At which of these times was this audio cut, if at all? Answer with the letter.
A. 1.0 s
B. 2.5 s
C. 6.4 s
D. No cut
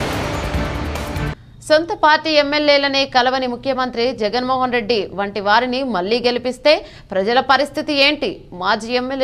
A